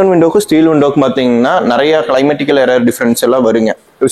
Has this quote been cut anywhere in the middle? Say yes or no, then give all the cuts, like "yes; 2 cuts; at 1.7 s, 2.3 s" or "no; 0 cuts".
no; 0 cuts